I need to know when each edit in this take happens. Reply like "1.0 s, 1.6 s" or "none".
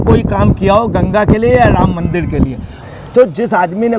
2.7 s